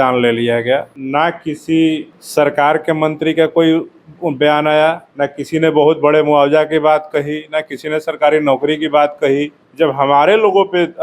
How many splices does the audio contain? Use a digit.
4